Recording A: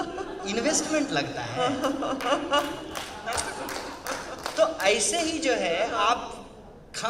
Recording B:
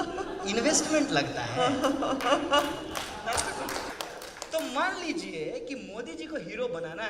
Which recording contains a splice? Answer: B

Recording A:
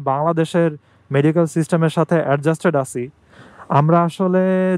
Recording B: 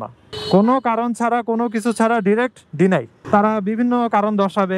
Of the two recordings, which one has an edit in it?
B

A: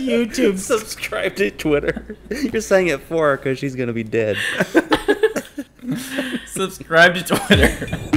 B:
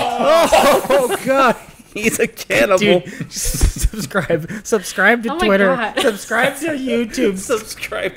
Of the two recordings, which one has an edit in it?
A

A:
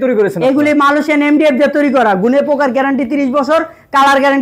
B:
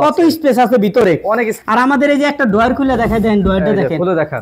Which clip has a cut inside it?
B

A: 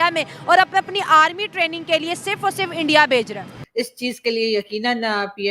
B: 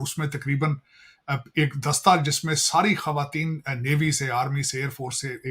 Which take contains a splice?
A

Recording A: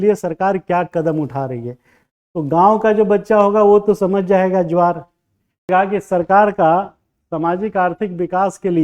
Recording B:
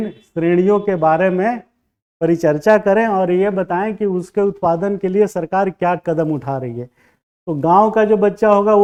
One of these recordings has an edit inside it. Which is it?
A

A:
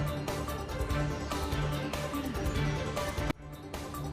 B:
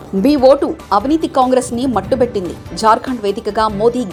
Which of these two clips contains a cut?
A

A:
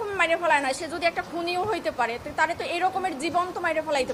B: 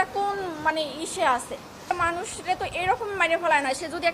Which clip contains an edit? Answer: B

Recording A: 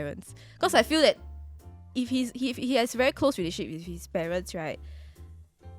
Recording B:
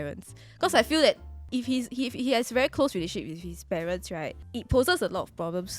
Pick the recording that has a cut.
B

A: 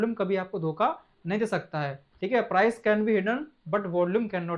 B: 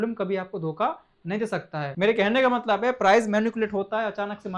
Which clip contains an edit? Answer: B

